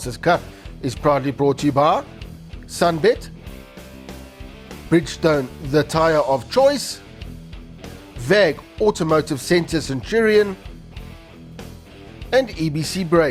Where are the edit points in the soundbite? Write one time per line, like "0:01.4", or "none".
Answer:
none